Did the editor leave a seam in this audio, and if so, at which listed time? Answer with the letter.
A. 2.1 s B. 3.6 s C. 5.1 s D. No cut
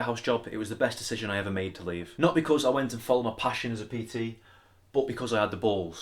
A